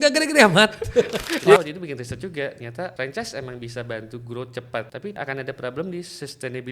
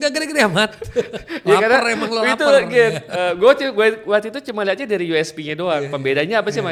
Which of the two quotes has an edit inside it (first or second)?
first